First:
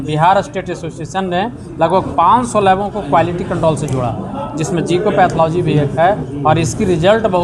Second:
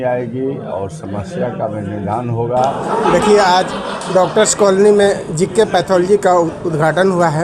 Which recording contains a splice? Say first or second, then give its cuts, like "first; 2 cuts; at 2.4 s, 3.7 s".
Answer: second; 1 cut; at 2.8 s